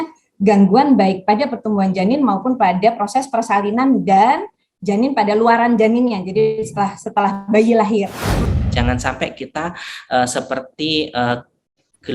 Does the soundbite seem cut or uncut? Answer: cut